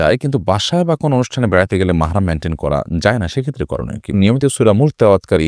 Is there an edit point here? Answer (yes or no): yes